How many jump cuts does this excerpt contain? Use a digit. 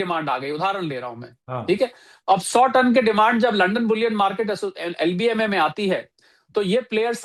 0